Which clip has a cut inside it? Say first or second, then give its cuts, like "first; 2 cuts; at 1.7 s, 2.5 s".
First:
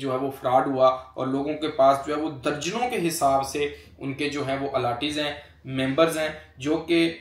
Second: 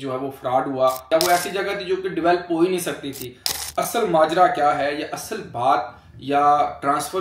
second; 2 cuts; at 1.1 s, 3.5 s